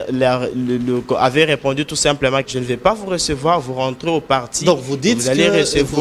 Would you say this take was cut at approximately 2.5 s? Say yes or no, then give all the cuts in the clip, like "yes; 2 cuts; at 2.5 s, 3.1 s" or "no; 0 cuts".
yes; 1 cut; at 2.5 s